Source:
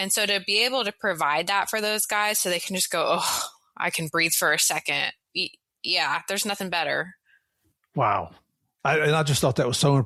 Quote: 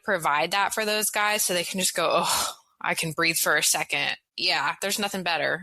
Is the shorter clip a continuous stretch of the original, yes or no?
no